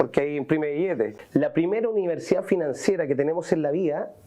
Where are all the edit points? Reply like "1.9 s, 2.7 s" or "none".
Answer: 1.2 s